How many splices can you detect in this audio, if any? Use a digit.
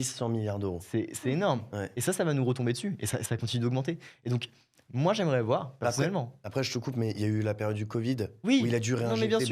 0